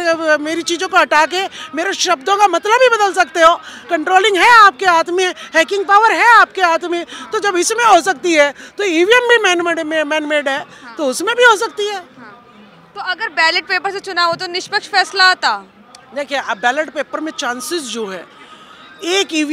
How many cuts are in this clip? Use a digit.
0